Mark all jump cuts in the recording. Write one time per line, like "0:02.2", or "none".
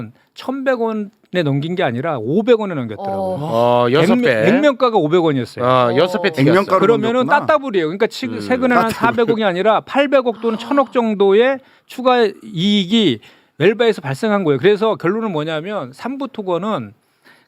none